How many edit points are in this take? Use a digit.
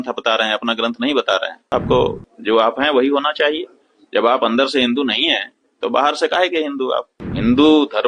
2